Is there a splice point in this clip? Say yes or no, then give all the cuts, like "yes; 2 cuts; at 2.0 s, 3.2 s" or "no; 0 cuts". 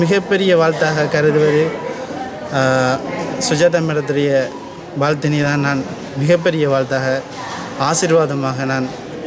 no; 0 cuts